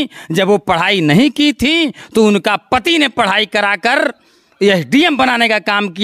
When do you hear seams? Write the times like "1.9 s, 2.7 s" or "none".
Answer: none